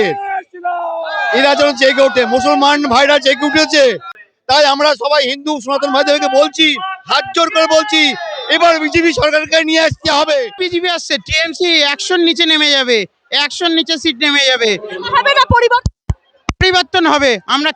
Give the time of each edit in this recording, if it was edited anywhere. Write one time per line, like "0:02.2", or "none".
0:10.6